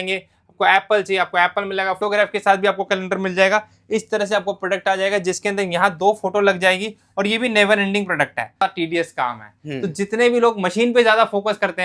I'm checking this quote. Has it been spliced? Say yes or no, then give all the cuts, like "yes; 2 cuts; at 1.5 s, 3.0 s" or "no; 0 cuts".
yes; 2 cuts; at 2.0 s, 8.6 s